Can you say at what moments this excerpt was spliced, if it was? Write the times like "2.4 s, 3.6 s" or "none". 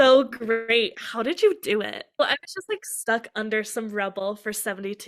2.2 s